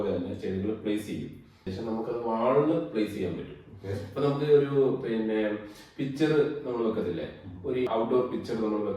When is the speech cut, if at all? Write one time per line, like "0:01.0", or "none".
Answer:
0:01.7
0:07.9